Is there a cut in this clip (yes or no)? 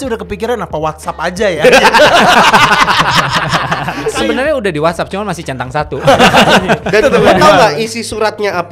no